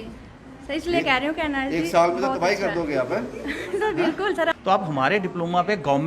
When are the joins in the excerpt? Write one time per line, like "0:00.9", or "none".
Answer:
0:04.5